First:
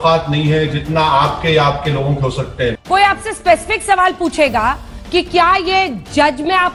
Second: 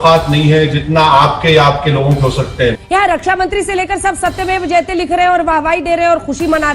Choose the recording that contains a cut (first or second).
second